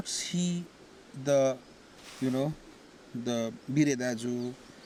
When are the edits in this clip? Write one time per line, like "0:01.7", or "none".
none